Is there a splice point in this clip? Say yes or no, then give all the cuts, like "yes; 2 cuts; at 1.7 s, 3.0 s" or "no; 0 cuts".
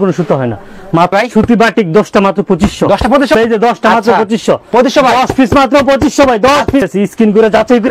yes; 3 cuts; at 1.1 s, 3.3 s, 6.8 s